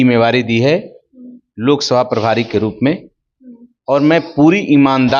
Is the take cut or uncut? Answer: uncut